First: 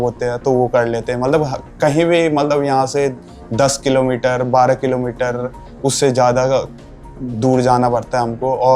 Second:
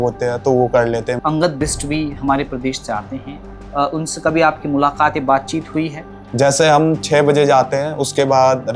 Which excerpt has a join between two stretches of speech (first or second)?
second